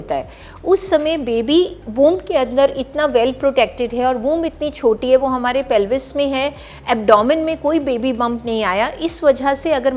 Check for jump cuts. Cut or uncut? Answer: uncut